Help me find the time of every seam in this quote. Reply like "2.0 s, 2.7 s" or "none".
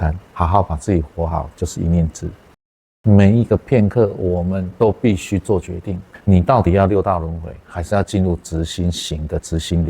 2.8 s, 6.1 s